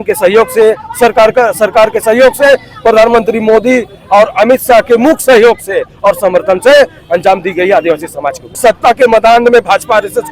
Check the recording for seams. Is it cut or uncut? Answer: cut